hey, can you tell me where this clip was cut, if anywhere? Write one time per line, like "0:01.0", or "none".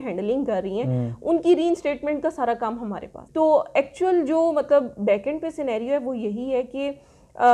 0:03.2